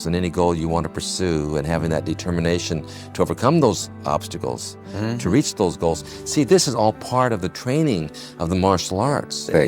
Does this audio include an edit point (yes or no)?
no